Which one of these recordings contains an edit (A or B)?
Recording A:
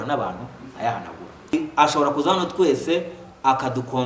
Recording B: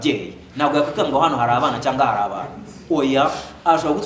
A